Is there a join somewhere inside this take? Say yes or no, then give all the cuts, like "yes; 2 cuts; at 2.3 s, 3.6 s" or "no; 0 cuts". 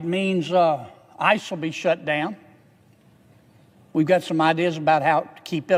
no; 0 cuts